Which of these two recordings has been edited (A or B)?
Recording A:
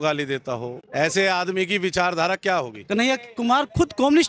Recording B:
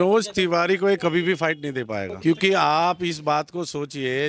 A